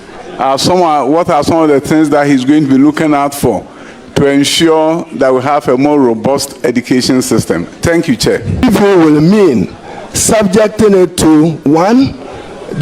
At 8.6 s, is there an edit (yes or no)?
yes